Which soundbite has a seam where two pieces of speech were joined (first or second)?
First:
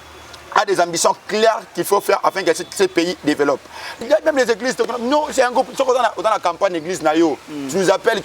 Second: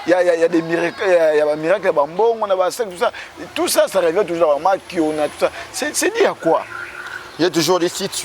first